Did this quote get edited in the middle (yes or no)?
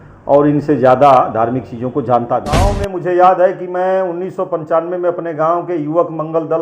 yes